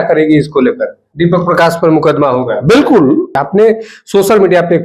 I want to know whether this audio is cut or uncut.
cut